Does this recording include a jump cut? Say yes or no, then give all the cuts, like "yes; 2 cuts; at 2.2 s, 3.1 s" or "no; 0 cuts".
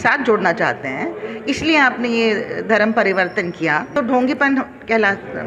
yes; 1 cut; at 3.9 s